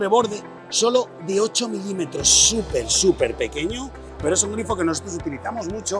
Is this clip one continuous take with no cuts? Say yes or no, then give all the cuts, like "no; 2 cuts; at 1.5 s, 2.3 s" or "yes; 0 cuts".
no; 1 cut; at 4.1 s